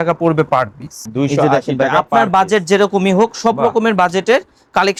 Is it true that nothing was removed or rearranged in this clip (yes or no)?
yes